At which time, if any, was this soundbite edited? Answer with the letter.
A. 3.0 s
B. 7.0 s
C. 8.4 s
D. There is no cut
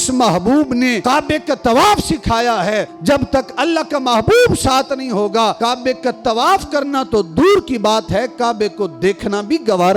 D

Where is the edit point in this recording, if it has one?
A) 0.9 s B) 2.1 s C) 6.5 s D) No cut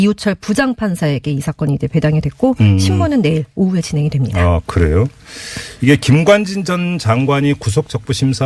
C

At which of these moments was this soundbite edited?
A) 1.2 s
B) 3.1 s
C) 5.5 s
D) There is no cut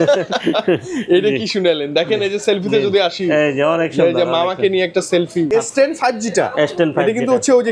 C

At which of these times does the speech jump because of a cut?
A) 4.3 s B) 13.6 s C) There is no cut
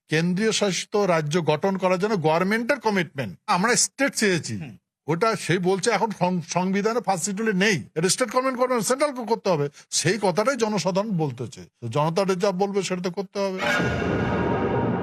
B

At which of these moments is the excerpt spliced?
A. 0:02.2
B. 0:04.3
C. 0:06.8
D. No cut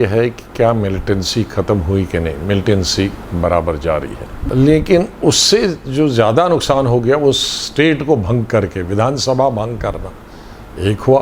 B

